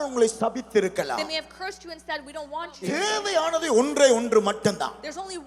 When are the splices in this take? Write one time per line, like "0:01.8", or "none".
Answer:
0:02.8

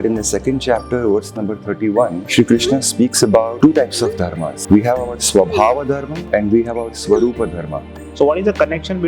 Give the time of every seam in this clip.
0:02.2
0:03.5
0:04.5
0:06.1
0:08.0

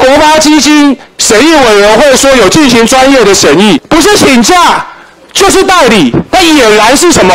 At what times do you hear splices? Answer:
0:03.8

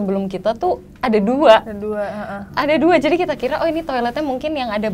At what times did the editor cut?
none

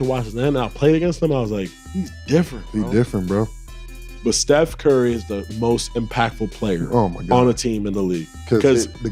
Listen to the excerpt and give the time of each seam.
none

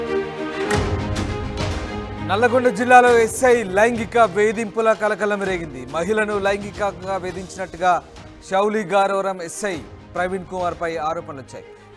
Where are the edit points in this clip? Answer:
0:01.0

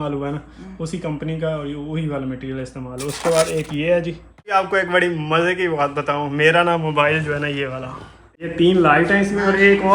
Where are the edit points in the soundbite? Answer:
0:04.5
0:08.5

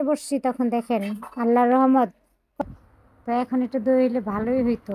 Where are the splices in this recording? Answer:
0:02.6

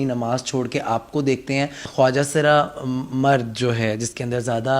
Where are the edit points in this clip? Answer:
0:01.8

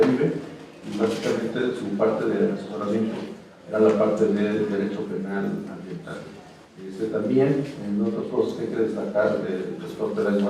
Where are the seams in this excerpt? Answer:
none

